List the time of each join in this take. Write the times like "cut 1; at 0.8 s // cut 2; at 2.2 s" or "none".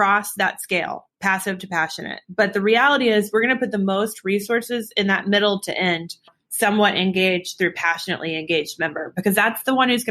cut 1; at 6.4 s